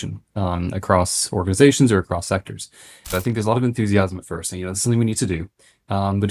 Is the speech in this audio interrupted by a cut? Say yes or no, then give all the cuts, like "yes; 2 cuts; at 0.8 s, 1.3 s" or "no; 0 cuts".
yes; 1 cut; at 3.1 s